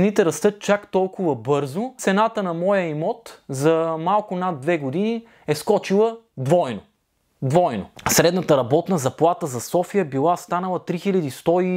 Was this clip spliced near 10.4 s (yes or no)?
no